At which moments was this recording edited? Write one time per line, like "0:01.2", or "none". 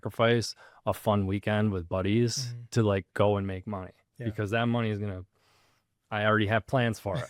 none